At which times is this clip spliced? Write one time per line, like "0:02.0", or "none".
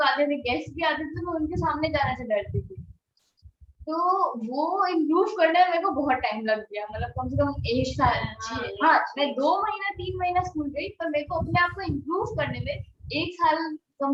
none